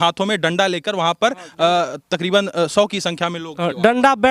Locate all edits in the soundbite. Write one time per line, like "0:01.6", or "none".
none

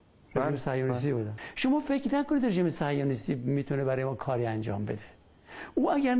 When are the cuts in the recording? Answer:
0:01.3

